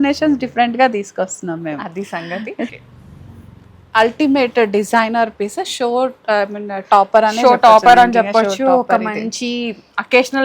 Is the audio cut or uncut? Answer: cut